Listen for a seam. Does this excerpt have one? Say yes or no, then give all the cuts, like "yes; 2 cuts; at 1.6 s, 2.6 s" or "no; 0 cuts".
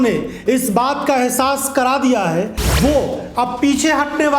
yes; 1 cut; at 2.6 s